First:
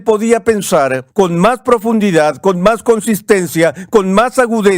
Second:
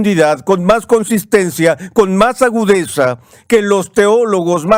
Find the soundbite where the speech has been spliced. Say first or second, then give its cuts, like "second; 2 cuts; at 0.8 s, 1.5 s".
first; 1 cut; at 1.0 s